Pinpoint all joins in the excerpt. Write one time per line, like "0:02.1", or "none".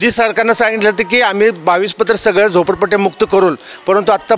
none